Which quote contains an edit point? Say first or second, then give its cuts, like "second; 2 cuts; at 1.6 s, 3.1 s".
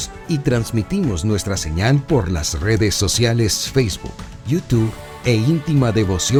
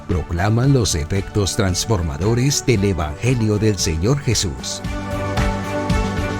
second; 1 cut; at 4.6 s